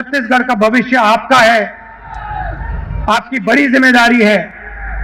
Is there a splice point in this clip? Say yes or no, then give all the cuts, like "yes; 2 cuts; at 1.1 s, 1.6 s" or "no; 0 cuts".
no; 0 cuts